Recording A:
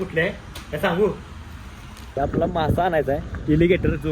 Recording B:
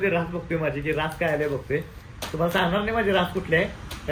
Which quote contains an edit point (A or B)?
A